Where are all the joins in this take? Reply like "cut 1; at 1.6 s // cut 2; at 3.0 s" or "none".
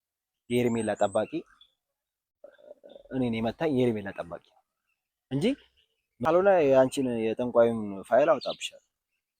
cut 1; at 6.2 s